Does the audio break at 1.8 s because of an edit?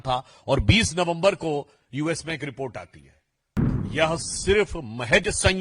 no; 1 cut; at 3.6 s

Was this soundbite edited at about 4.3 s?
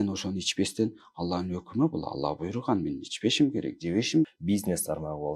yes; 1 cut; at 4.3 s

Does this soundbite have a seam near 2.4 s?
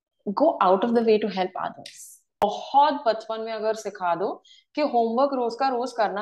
yes; 1 cut; at 2.4 s

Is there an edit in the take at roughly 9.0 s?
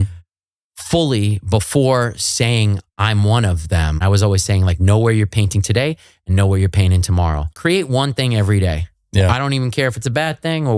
no; 2 cuts; at 4.0 s, 7.5 s

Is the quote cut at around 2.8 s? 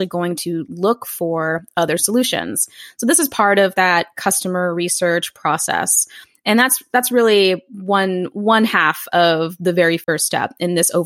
no; 0 cuts

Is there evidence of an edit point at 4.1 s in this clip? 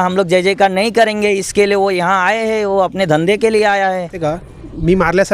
yes; 1 cut; at 4.1 s

